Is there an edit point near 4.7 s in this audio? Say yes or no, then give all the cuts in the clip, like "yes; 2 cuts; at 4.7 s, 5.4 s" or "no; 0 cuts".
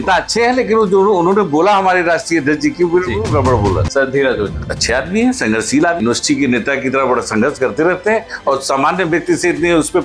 yes; 3 cuts; at 3.9 s, 4.7 s, 6.0 s